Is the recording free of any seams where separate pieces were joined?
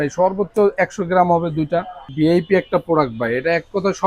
no; 1 cut; at 2.1 s

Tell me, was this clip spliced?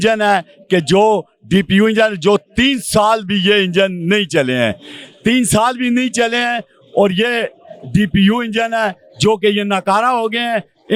no; 0 cuts

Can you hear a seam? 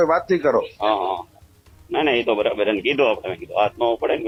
no; 0 cuts

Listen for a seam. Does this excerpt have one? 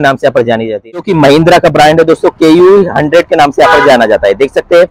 yes; 1 cut; at 0.9 s

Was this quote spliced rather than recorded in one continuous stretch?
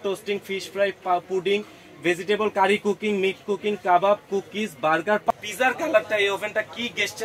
yes; 1 cut; at 5.3 s

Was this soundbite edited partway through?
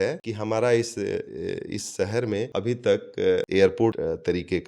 yes; 3 cuts; at 2.5 s, 3.5 s, 4.0 s

